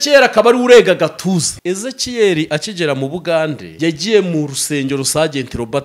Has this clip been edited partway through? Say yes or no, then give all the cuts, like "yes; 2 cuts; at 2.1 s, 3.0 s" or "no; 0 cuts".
yes; 2 cuts; at 1.5 s, 3.7 s